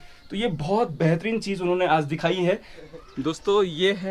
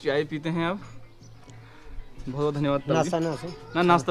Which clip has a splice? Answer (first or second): first